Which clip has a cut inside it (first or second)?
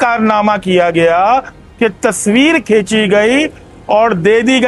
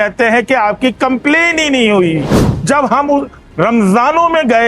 second